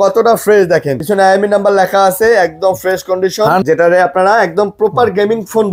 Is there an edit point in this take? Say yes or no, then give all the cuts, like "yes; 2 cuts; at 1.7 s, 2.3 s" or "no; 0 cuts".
yes; 2 cuts; at 1.0 s, 3.6 s